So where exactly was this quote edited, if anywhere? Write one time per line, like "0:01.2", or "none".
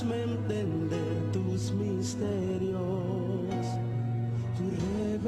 none